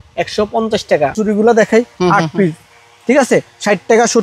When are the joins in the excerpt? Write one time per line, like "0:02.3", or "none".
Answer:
0:01.2